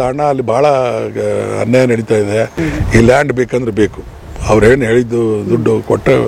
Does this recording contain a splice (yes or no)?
yes